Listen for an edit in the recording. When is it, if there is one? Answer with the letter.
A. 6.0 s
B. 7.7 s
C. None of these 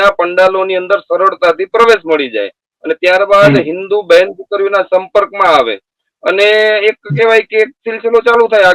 C